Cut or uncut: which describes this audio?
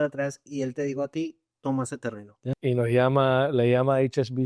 cut